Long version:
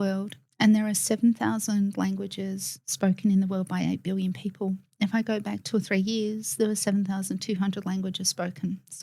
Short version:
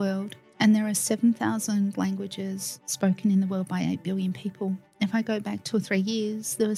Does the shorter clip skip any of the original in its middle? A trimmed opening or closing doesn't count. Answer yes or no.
no